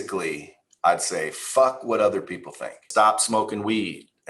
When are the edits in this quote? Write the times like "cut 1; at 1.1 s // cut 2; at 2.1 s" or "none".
cut 1; at 2.8 s